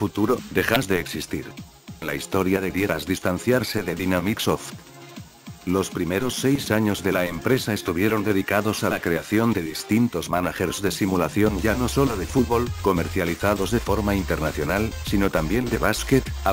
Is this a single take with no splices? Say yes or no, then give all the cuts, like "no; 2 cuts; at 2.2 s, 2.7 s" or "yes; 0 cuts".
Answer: yes; 0 cuts